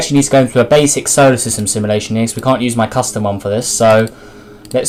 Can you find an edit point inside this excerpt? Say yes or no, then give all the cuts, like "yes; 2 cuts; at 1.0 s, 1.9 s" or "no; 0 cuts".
no; 0 cuts